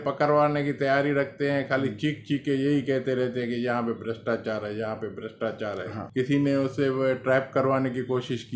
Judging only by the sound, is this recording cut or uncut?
cut